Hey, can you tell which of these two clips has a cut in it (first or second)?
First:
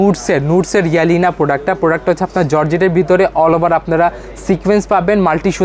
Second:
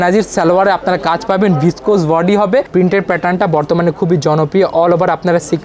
second